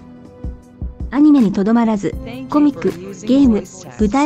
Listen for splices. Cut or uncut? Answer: uncut